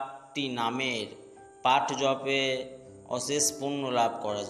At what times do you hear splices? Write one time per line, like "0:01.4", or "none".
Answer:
none